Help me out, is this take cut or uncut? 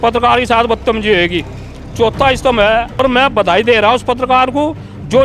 cut